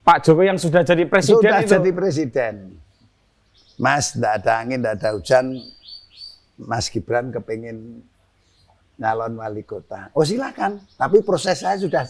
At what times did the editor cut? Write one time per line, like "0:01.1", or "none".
none